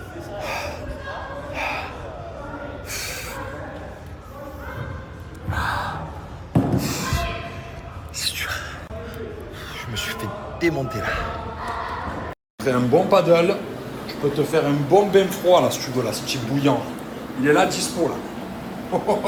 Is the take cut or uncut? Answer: uncut